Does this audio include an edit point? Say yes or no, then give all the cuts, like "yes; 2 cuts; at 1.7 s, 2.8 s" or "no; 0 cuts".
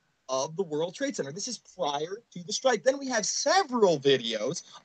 yes; 1 cut; at 1.9 s